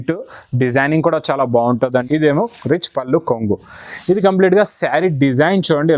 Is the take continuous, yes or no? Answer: no